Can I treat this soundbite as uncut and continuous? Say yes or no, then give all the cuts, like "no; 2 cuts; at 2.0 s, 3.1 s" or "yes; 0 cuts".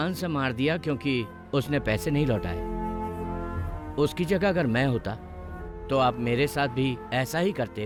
yes; 0 cuts